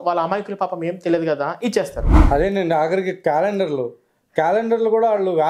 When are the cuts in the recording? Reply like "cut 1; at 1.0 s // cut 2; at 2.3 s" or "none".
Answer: cut 1; at 2.1 s